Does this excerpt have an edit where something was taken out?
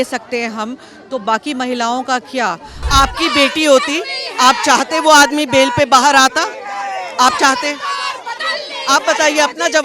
yes; 1 cut; at 2.8 s

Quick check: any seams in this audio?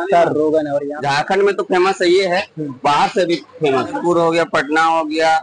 yes; 2 cuts; at 1.0 s, 4.0 s

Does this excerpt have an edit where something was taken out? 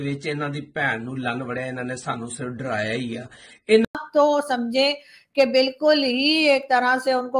yes; 1 cut; at 3.8 s

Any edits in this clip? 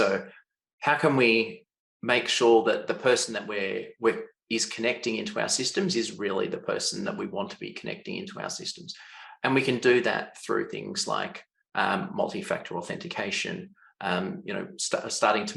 no; 0 cuts

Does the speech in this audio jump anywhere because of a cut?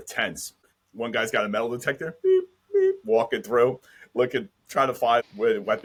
no; 0 cuts

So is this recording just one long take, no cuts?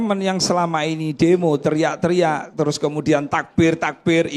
yes; 0 cuts

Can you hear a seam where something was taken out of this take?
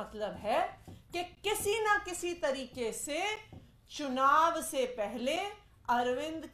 no; 0 cuts

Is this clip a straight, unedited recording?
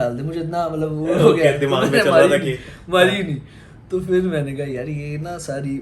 yes; 0 cuts

